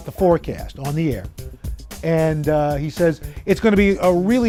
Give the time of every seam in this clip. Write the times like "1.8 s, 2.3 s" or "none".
none